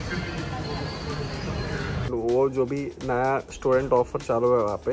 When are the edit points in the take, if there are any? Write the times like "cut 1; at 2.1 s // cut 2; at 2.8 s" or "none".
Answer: cut 1; at 2.1 s